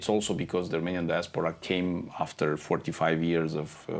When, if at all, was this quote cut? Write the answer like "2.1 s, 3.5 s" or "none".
none

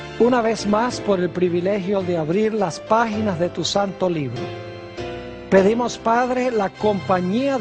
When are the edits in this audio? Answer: 3.1 s

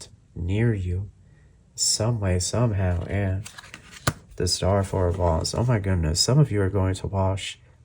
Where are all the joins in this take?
4.2 s

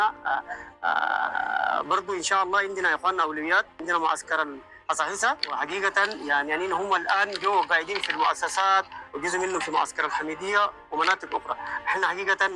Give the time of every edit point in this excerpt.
none

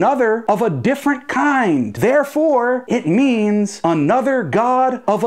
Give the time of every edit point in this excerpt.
1.9 s

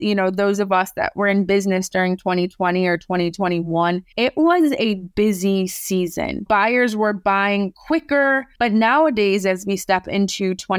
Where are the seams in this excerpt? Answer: 8.5 s

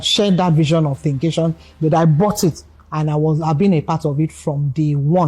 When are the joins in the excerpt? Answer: none

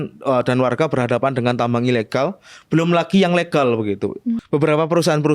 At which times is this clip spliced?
4.4 s

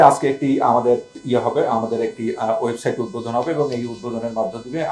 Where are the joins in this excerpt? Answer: 1.1 s

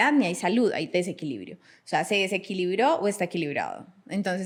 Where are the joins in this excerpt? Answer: none

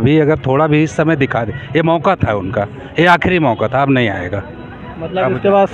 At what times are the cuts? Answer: none

